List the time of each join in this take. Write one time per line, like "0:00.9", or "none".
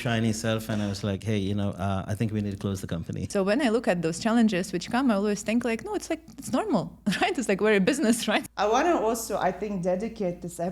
0:03.2
0:08.5

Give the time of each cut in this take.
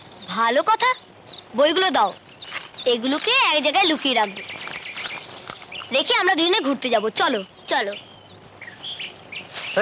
none

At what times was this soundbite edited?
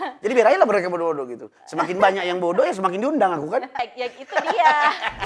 0:03.8

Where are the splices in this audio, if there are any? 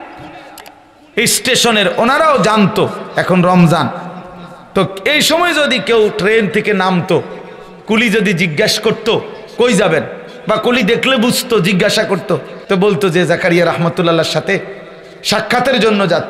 0:12.5

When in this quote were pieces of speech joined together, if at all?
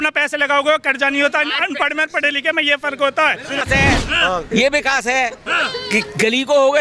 0:03.6

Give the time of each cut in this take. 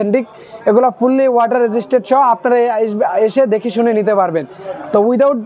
none

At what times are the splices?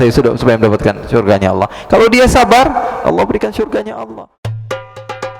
0:04.0

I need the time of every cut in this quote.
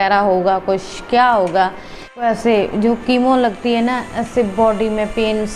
0:02.2

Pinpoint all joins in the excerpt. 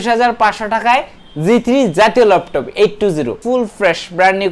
0:03.4

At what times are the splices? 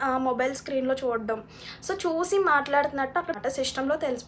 0:03.4

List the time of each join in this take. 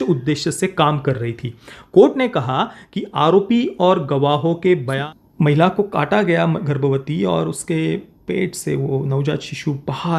0:04.9

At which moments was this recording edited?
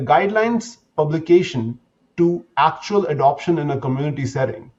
none

